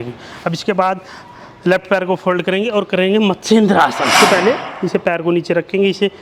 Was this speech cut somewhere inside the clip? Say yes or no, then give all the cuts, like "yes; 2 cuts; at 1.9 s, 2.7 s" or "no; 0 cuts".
yes; 1 cut; at 4.2 s